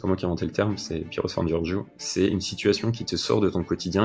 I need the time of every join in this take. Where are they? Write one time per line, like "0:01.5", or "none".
none